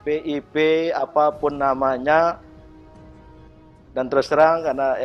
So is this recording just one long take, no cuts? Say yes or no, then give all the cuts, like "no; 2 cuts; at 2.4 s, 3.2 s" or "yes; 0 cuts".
yes; 0 cuts